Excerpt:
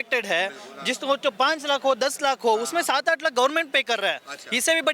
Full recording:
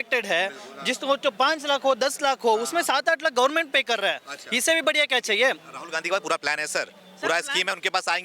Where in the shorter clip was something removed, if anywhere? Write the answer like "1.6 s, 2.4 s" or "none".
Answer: none